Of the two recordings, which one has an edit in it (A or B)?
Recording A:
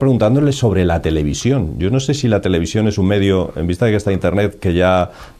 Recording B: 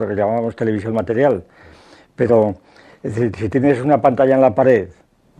A